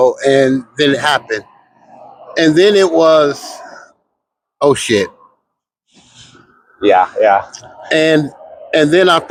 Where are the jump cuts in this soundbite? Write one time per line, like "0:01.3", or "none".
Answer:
none